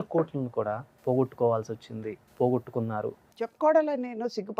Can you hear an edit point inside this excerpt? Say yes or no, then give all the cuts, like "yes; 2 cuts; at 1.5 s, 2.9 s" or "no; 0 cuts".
yes; 3 cuts; at 0.9 s, 2.2 s, 3.2 s